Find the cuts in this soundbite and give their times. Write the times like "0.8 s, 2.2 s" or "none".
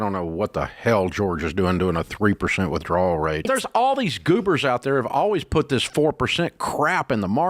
3.5 s